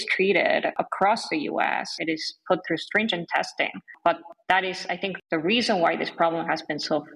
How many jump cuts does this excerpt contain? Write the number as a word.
zero